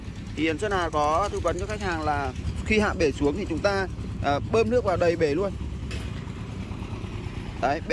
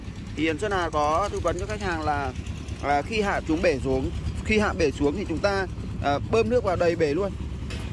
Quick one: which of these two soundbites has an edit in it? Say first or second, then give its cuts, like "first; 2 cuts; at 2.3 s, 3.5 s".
first; 1 cut; at 2.5 s